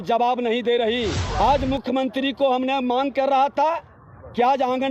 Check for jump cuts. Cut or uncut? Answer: cut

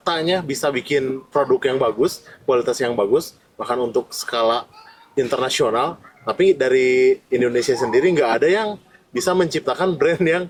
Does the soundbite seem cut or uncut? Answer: uncut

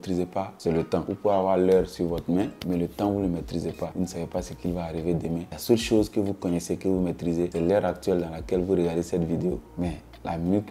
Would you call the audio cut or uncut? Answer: uncut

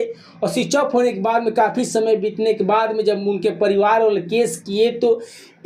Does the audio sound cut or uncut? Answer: uncut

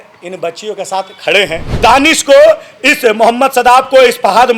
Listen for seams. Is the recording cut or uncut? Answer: cut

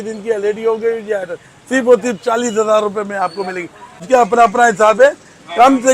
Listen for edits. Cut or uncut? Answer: cut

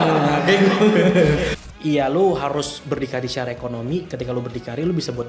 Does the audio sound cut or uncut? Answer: cut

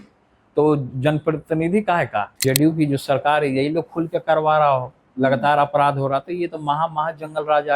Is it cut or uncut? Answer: cut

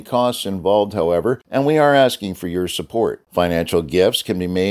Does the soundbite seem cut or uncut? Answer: cut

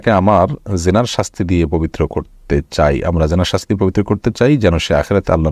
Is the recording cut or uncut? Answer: uncut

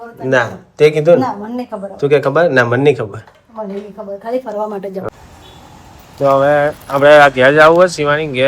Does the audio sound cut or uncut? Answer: cut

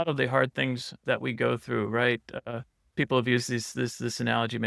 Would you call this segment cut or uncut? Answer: cut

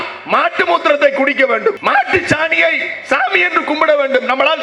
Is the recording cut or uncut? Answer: cut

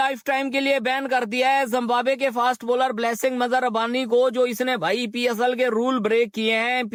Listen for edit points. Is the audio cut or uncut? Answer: uncut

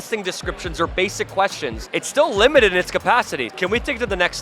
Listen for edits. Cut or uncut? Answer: cut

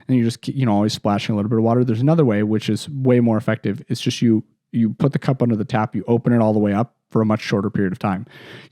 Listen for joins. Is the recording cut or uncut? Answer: uncut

